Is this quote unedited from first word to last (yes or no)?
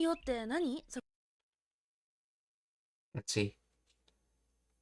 yes